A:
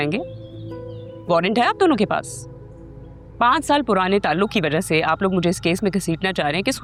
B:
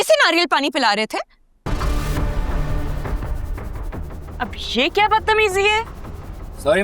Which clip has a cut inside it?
B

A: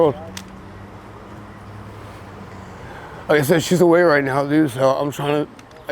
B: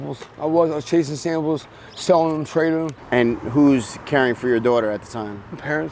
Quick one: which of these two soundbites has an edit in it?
B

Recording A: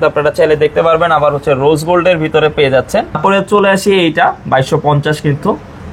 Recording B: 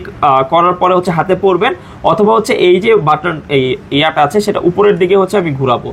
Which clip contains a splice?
A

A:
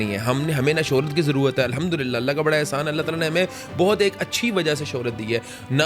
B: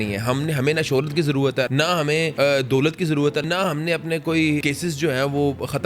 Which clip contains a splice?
B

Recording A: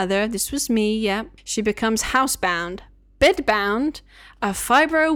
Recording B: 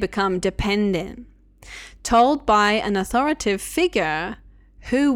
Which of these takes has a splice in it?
A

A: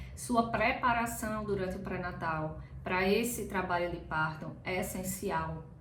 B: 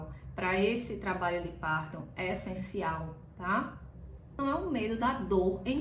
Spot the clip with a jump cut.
B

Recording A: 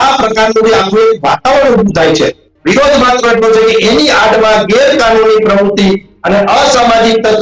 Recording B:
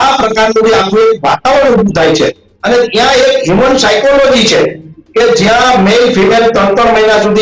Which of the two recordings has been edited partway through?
A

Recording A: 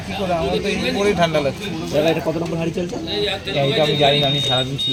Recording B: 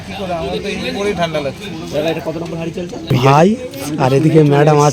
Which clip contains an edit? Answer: B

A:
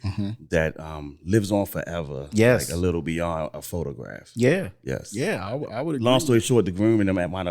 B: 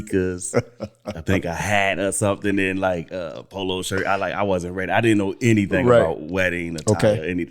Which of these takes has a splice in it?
A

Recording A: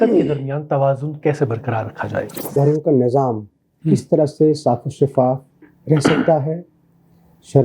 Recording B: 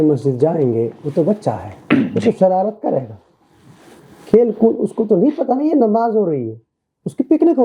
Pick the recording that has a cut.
A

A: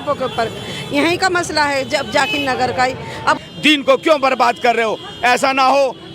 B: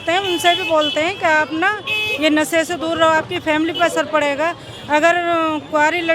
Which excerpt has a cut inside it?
A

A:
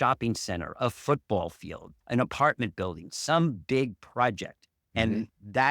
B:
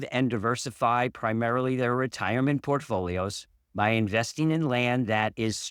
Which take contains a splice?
A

